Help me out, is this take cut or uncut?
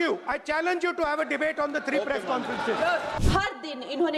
cut